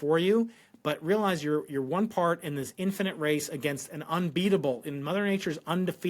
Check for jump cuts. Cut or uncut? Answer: uncut